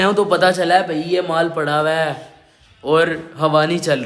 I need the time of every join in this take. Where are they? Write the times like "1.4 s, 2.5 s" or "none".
none